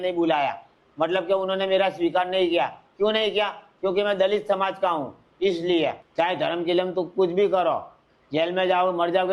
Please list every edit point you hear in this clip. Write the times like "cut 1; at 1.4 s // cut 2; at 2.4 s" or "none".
cut 1; at 6.0 s